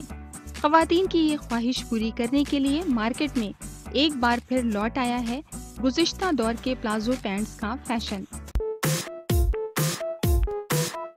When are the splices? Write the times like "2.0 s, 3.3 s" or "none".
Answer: 8.5 s

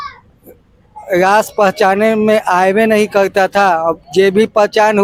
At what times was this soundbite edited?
none

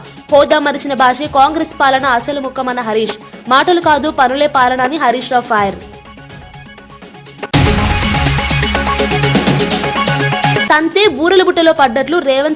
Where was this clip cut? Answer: none

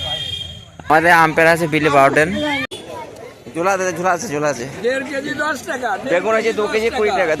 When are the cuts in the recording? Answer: 2.6 s

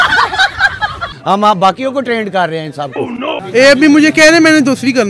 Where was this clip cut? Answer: 1.1 s, 3.4 s

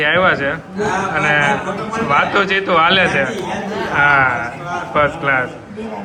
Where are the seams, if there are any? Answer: none

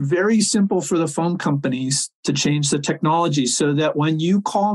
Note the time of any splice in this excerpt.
none

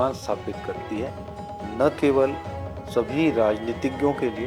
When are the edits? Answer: none

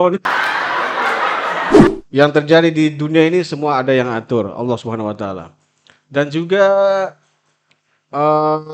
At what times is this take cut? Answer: 1.9 s

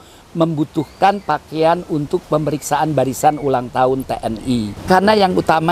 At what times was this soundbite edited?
4.7 s

